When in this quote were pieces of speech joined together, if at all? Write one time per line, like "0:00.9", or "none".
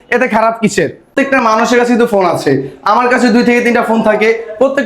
0:01.1